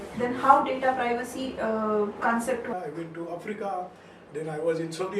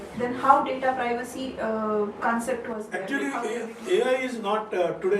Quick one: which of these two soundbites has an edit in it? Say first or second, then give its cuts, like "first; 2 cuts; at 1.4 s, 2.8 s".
first; 1 cut; at 2.7 s